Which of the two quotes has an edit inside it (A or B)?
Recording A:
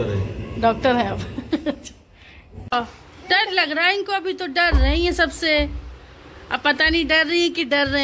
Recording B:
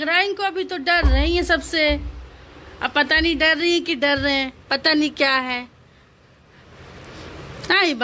A